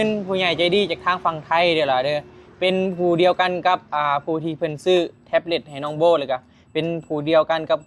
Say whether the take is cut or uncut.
uncut